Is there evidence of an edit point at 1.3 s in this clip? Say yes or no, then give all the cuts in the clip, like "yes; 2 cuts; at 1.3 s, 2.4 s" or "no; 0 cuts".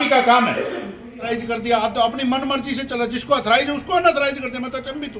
yes; 1 cut; at 1.3 s